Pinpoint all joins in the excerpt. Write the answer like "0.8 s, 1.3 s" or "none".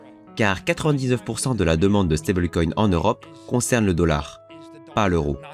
none